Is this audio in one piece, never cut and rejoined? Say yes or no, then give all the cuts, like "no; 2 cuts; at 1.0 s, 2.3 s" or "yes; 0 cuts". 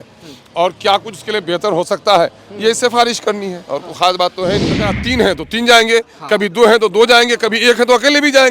no; 1 cut; at 4.9 s